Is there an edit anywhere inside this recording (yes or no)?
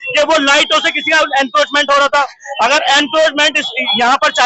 no